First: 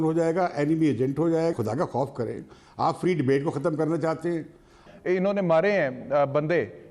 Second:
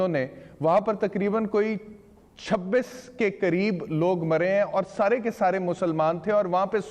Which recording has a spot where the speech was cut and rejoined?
first; 2 cuts; at 1.5 s, 4.8 s

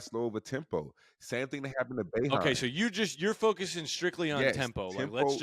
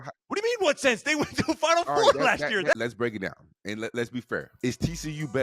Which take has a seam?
second; 2 cuts; at 2.7 s, 4.5 s

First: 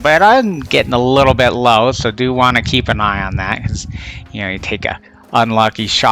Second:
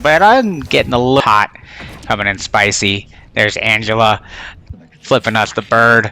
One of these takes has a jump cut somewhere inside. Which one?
second; 1 cut; at 1.2 s

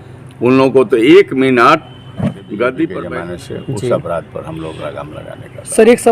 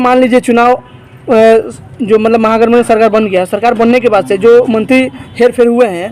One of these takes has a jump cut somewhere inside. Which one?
first; 1 cut; at 3.0 s

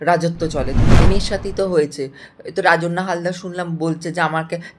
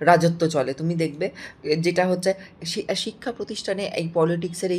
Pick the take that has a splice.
first; 1 cut; at 1.1 s

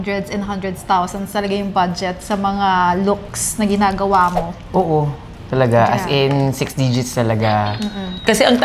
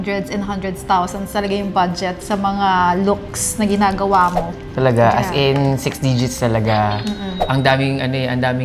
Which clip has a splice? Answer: second; 2 cuts; at 4.6 s, 7.4 s

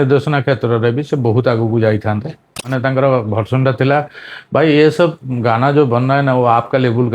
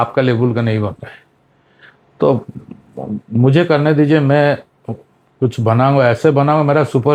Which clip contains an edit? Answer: first; 1 cut; at 2.7 s

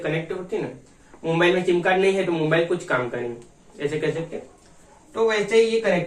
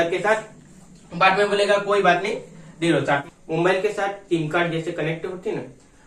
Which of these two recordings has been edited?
second; 1 cut; at 3.3 s

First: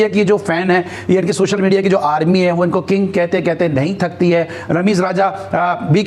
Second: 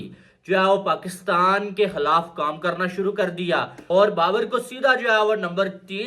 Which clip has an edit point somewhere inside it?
second; 1 cut; at 3.7 s

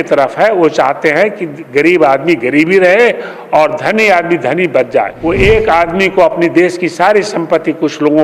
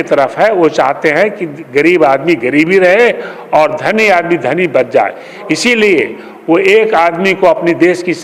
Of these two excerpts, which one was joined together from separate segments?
first; 1 cut; at 5.1 s

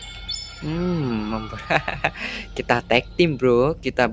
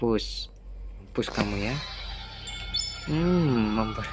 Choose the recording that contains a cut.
second; 1 cut; at 1.0 s

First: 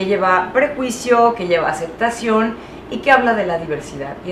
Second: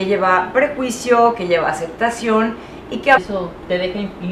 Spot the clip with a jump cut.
first; 1 cut; at 3.2 s

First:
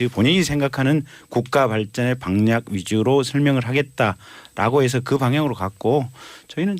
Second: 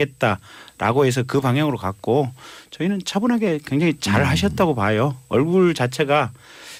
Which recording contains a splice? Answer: first; 1 cut; at 2.6 s

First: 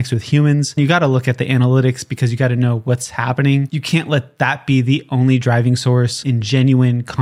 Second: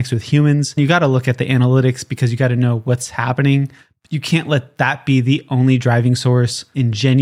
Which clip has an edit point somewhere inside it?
first; 2 cuts; at 3.8 s, 6.2 s

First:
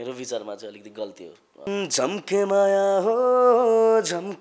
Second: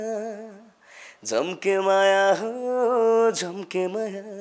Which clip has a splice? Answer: first; 1 cut; at 1.7 s

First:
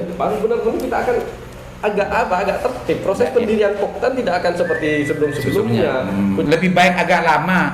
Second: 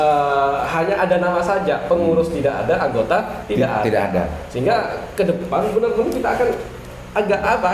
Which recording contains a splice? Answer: first; 1 cut; at 6.4 s

